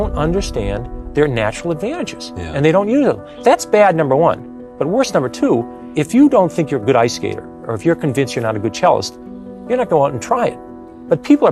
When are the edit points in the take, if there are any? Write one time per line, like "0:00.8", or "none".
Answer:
0:03.3
0:05.8